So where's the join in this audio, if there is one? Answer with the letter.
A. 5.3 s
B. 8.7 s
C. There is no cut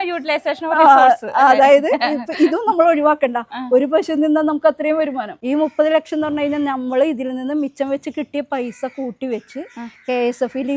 A